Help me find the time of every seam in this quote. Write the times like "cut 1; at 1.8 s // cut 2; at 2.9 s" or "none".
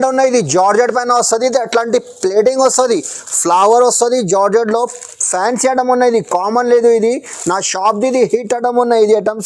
none